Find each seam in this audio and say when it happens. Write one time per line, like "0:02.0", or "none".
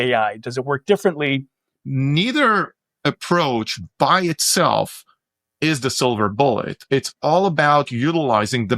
0:01.7